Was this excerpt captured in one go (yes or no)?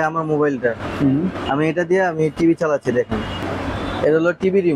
no